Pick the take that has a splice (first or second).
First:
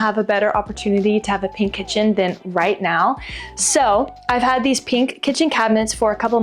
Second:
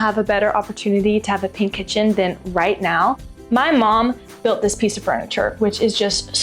second